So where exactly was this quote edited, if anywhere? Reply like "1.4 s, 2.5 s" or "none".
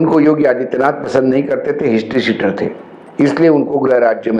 none

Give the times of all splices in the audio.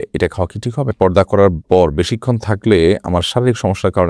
0.9 s

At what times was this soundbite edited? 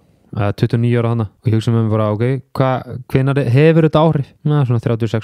1.3 s, 4.3 s

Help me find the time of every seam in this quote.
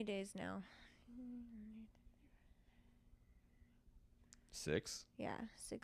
none

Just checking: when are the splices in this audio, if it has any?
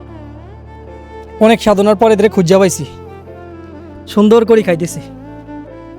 1.4 s

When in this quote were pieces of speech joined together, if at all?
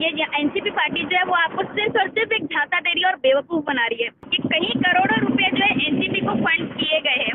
4.3 s

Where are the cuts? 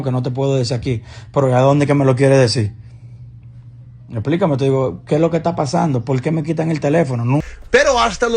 7.4 s

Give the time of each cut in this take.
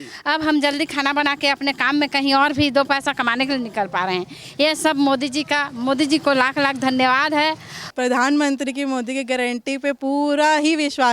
7.8 s

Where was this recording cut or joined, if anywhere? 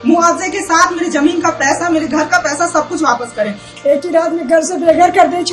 3.6 s

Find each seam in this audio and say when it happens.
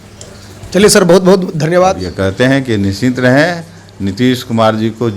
2.1 s

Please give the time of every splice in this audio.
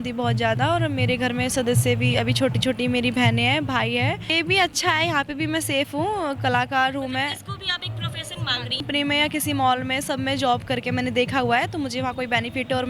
4.3 s, 8.8 s

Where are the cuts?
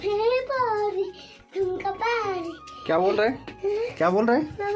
none

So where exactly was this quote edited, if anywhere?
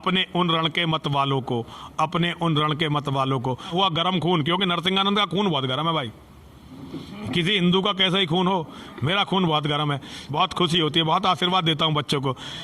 3.7 s, 10.2 s

